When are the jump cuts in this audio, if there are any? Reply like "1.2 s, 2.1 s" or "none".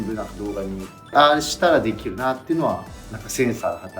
1.1 s